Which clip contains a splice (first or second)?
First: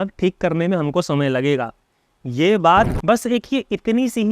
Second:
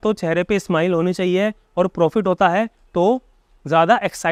first